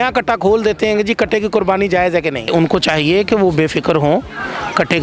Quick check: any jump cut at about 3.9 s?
no; 1 cut; at 2.5 s

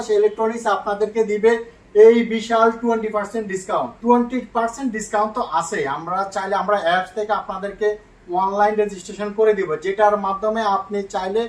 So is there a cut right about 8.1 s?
no; 1 cut; at 3.9 s

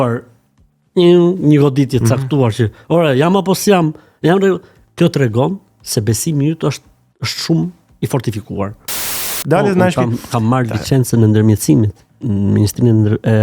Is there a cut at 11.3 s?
no; 1 cut; at 9.3 s

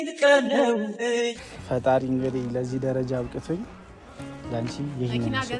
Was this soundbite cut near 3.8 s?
no; 1 cut; at 1.4 s

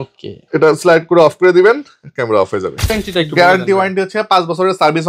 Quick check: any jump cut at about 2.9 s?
yes; 1 cut; at 2.9 s

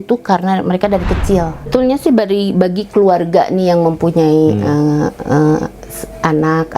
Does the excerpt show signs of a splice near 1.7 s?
yes; 1 cut; at 1.7 s

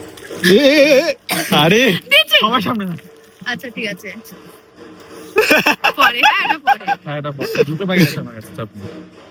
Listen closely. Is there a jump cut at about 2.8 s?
no; 0 cuts

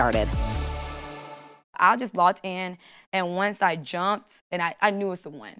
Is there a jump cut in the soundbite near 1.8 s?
yes; 1 cut; at 1.8 s

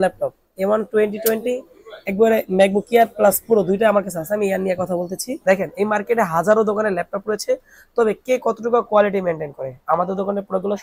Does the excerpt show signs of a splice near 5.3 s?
yes; 1 cut; at 5.3 s

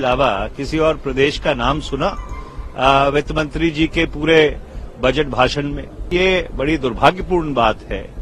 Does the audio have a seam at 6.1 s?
yes; 1 cut; at 6.1 s

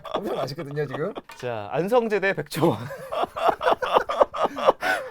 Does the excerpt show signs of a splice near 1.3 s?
yes; 1 cut; at 1.3 s

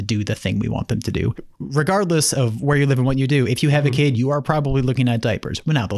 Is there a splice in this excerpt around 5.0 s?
no; 1 cut; at 1.5 s

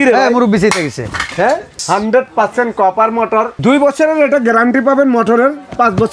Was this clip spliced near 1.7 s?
yes; 2 cuts; at 1.7 s, 3.5 s

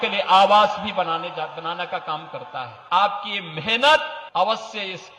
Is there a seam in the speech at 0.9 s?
no; 2 cuts; at 2.8 s, 4.2 s

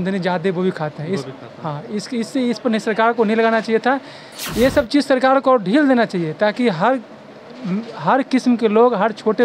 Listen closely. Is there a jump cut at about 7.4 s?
no; 0 cuts

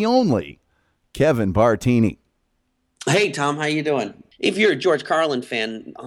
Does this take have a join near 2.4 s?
no; 1 cut; at 4.2 s

